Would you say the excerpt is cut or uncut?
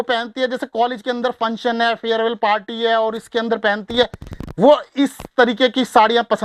uncut